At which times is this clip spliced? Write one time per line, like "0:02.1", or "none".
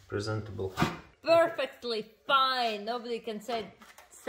0:01.1